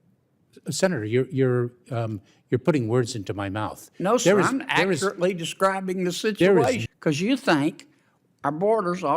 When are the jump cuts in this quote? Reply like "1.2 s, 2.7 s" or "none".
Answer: 6.9 s